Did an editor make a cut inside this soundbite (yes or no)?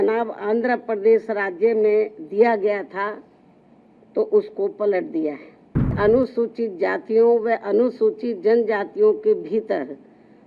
yes